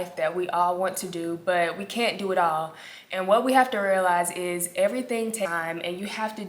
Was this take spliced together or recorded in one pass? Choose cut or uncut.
cut